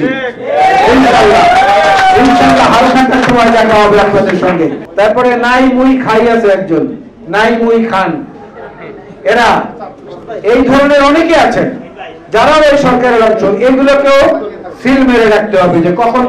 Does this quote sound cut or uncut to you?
cut